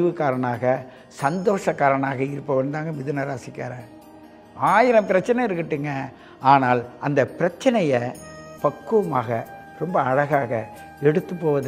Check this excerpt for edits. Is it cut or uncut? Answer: uncut